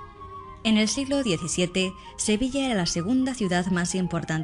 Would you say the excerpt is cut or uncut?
cut